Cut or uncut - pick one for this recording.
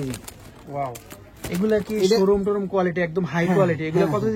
uncut